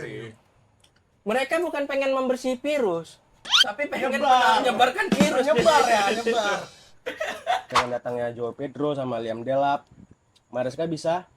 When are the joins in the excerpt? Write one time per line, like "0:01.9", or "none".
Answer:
0:07.7